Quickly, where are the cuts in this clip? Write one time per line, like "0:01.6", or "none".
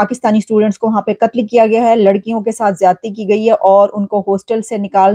none